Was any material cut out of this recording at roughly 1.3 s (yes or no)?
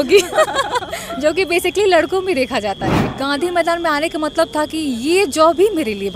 no